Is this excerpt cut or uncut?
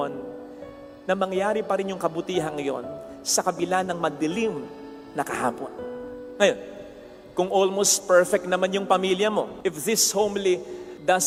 uncut